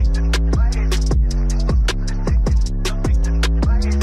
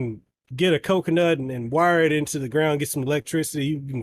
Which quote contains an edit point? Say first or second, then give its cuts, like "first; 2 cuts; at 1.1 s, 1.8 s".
first; 1 cut; at 1.4 s